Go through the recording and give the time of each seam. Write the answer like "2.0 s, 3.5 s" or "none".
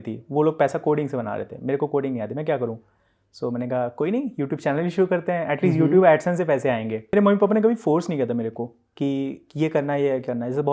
7.1 s